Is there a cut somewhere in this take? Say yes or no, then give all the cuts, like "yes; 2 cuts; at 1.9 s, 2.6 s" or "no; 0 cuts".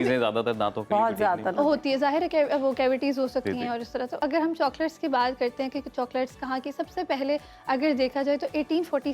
yes; 1 cut; at 4.2 s